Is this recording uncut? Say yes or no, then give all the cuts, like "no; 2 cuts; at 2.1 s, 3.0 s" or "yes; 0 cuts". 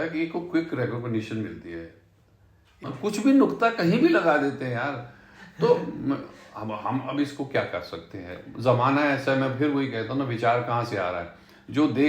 no; 1 cut; at 2.9 s